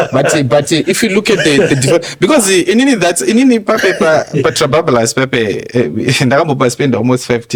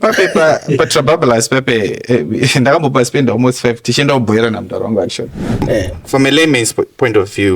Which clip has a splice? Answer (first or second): second